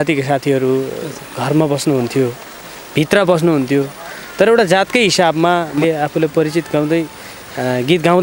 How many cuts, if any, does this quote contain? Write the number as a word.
one